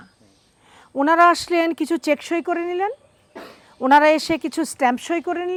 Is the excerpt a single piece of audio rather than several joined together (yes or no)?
yes